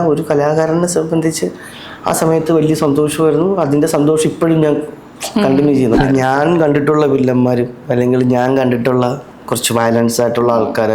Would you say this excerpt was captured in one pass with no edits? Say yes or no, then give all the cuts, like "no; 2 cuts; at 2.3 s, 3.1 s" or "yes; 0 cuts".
no; 1 cut; at 5.9 s